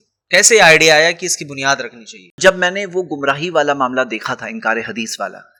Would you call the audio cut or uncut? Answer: uncut